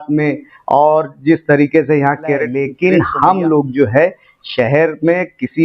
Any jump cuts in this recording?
yes; 1 cut; at 2.6 s

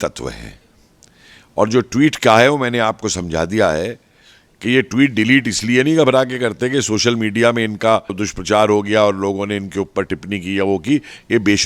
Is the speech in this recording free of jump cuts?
yes; 0 cuts

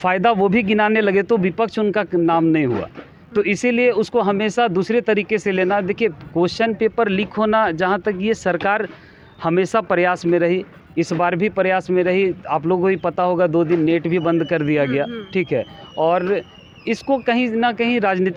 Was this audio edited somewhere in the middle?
no; 0 cuts

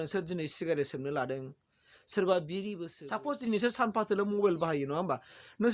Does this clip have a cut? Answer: yes; 1 cut; at 2.8 s

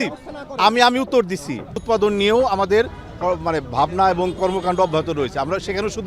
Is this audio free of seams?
no; 1 cut; at 1.8 s

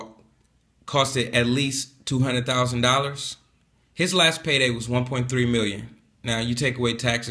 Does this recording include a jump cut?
no; 0 cuts

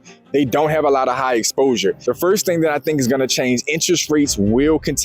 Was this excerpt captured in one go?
no; 1 cut; at 2.0 s

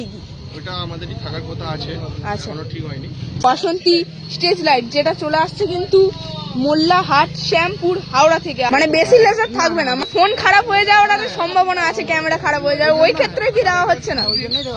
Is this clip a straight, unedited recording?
no; 3 cuts; at 3.4 s, 8.7 s, 10.1 s

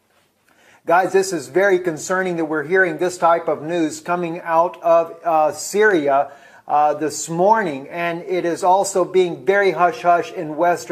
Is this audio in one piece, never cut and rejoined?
no; 1 cut; at 8.2 s

